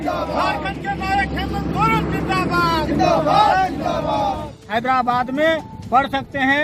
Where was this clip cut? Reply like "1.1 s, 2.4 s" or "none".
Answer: 4.5 s